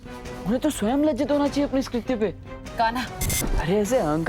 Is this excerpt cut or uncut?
cut